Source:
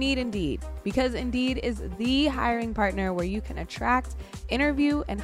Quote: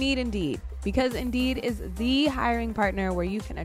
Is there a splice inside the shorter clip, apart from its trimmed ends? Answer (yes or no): no